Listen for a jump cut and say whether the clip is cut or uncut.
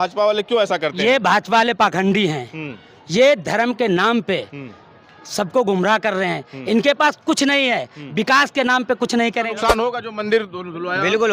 cut